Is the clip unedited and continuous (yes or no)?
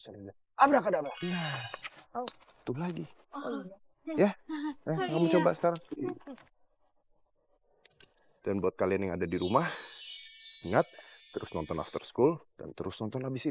yes